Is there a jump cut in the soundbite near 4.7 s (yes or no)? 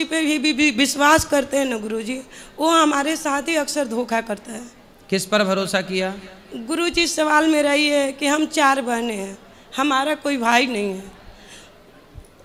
no